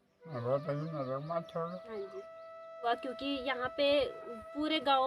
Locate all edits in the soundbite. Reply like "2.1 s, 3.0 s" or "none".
2.9 s